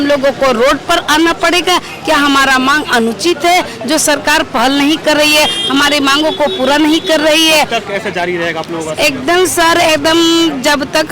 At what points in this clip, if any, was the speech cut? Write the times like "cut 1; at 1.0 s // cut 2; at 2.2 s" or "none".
none